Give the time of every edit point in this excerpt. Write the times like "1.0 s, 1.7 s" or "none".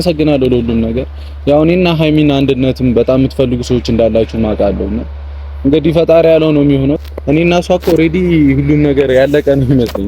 7.0 s